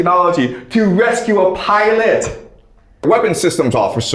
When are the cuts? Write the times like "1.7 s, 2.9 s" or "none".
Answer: 3.1 s